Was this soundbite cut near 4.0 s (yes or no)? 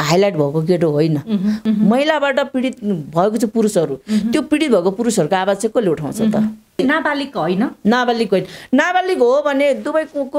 no